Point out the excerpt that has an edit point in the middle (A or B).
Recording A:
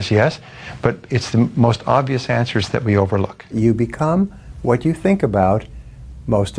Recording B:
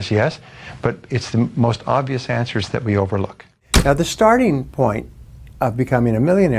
A